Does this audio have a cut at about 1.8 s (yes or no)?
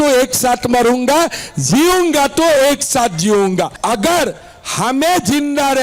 no